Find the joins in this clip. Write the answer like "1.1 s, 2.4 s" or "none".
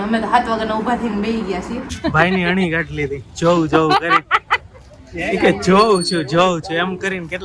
1.8 s